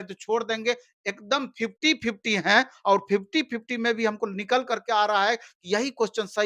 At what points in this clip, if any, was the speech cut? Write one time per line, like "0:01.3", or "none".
none

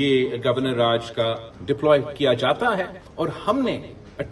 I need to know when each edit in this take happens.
0:01.5
0:03.0

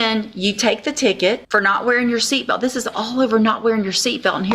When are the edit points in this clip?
0:01.4

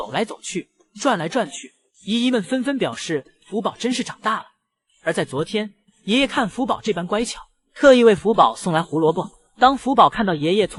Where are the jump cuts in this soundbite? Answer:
none

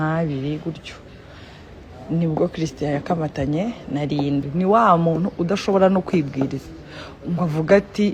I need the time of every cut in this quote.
none

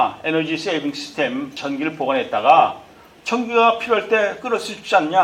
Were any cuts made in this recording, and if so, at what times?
0:01.5

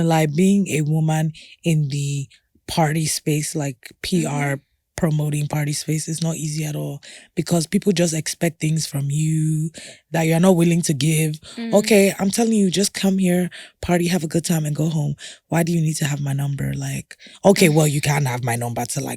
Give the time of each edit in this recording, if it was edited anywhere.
0:10.0

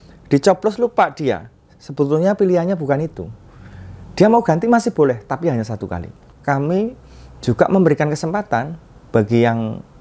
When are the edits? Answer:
0:06.2

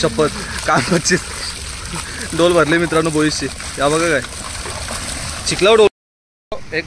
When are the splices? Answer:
0:05.9

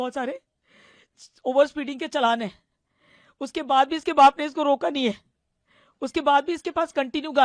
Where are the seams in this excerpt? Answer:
none

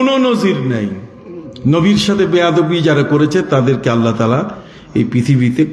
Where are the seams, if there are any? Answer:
none

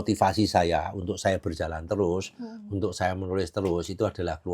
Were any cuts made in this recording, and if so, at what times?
none

